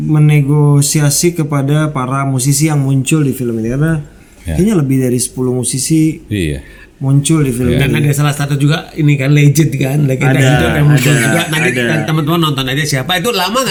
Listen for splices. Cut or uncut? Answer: uncut